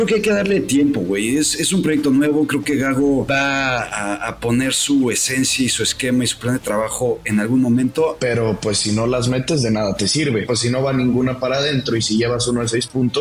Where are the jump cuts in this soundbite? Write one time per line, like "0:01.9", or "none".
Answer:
0:03.3
0:08.2
0:10.4